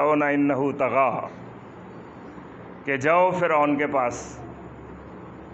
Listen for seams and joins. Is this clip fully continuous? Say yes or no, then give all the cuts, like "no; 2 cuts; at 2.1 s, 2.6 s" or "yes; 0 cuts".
yes; 0 cuts